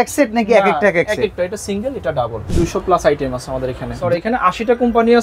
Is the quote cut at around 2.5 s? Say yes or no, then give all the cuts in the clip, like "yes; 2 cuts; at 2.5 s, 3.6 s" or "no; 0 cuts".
yes; 2 cuts; at 2.5 s, 4.0 s